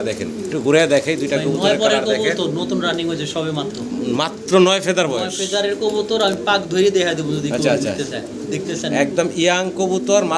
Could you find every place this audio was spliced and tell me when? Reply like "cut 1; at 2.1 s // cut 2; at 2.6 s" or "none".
none